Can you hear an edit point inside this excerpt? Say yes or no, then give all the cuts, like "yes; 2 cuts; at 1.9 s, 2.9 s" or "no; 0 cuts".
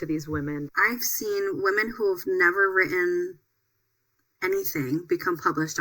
yes; 1 cut; at 0.9 s